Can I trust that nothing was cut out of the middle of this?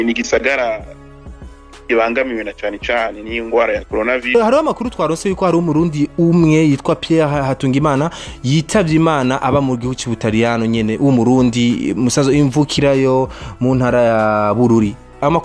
no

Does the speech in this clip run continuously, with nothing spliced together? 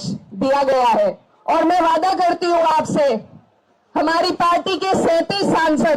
no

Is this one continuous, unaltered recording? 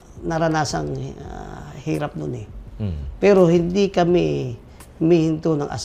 yes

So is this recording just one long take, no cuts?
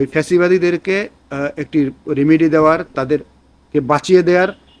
yes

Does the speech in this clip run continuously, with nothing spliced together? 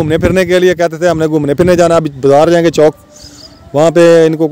yes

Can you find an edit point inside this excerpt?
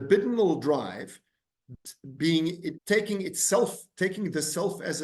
yes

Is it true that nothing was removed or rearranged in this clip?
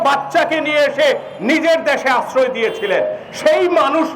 yes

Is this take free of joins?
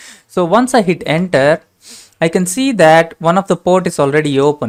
yes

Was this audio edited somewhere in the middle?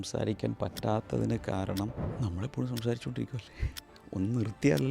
yes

